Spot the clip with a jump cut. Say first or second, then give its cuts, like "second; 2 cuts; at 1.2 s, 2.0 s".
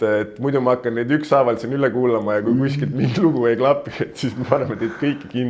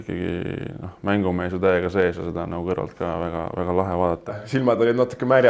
second; 1 cut; at 4.4 s